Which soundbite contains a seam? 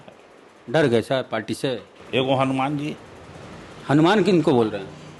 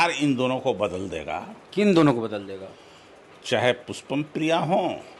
first; 1 cut; at 1.9 s

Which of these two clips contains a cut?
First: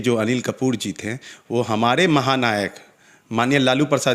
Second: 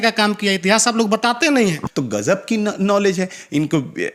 second; 1 cut; at 1.9 s

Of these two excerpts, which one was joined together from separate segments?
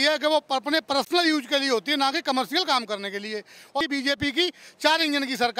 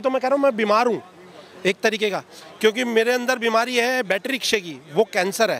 first; 1 cut; at 3.8 s

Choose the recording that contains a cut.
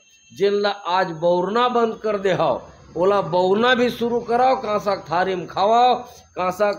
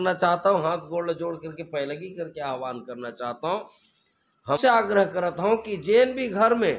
second; 1 cut; at 4.6 s

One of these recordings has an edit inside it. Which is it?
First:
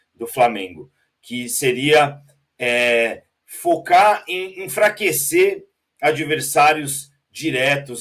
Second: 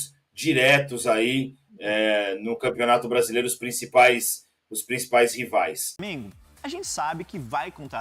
second; 1 cut; at 6.3 s

